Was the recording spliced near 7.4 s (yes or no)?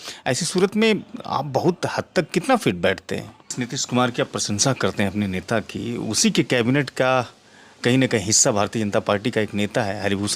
no